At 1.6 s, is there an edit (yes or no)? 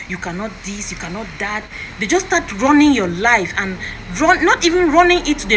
no